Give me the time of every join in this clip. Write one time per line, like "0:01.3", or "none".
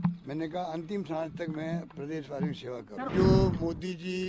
0:03.1